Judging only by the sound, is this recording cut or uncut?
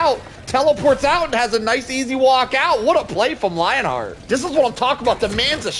cut